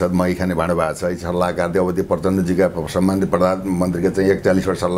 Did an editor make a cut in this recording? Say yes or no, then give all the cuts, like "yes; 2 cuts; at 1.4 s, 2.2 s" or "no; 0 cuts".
no; 0 cuts